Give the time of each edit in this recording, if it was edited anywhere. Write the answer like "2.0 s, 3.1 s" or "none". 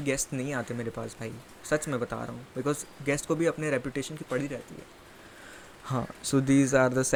none